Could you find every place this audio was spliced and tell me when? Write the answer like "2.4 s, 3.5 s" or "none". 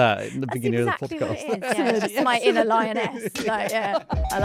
none